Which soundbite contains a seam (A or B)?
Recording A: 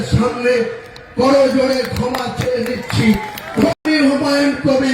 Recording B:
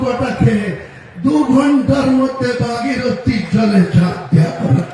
A